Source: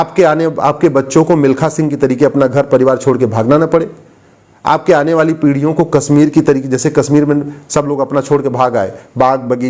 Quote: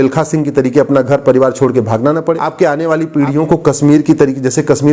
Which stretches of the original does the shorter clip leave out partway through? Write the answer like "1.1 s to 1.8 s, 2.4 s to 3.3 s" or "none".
3.9 s to 4.7 s